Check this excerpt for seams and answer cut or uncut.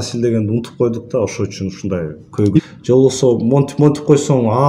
cut